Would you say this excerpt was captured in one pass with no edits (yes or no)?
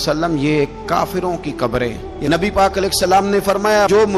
no